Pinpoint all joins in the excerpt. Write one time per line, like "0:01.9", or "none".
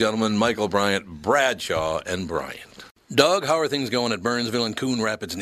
0:02.9